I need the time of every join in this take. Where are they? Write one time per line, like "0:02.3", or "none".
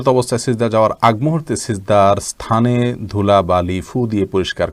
none